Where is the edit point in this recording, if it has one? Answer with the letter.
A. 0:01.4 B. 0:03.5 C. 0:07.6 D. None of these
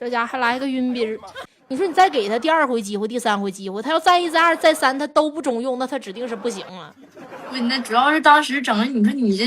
A